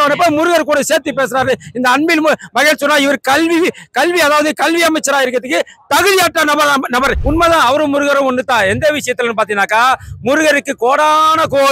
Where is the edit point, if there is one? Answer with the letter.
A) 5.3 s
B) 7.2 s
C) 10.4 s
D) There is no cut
B